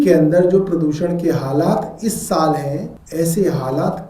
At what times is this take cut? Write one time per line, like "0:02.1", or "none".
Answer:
0:03.0